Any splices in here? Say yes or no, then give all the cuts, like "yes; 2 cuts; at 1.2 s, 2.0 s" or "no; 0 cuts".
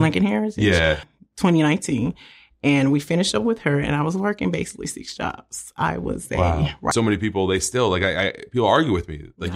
yes; 2 cuts; at 1.1 s, 6.9 s